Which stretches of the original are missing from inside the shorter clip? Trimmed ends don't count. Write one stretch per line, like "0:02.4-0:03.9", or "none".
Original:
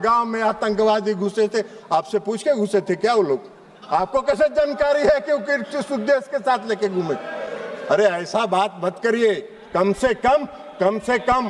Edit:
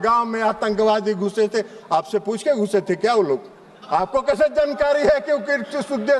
none